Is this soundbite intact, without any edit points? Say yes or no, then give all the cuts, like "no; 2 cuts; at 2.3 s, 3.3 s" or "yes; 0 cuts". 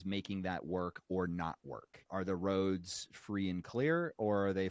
no; 1 cut; at 2.1 s